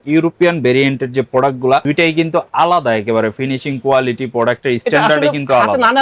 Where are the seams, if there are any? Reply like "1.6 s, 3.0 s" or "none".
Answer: none